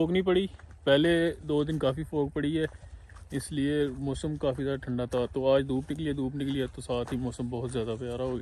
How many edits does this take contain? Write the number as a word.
zero